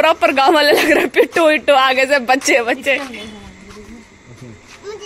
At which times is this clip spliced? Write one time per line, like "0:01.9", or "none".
none